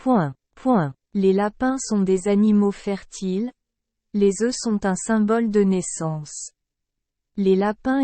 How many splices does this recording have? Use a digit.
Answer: 1